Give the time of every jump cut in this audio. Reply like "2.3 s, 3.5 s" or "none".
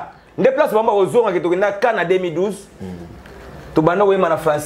none

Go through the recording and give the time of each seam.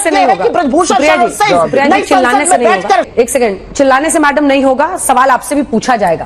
3.1 s

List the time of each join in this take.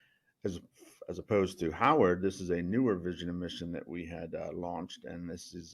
none

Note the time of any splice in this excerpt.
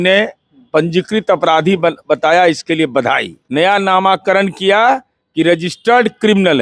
3.4 s

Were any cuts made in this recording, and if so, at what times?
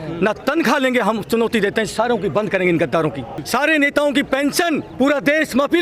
3.3 s, 4.9 s

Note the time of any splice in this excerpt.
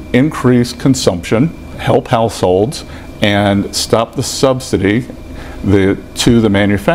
1.7 s

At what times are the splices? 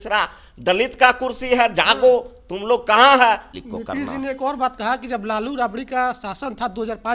3.5 s

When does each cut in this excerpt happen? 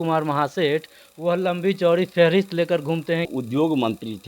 3.3 s

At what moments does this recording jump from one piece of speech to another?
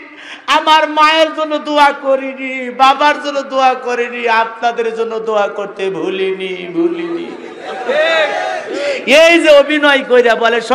none

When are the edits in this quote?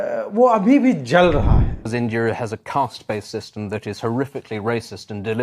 1.9 s

